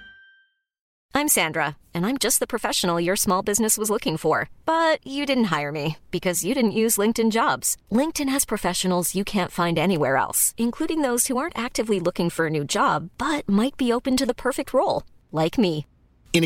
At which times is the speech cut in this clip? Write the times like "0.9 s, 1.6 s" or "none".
0.9 s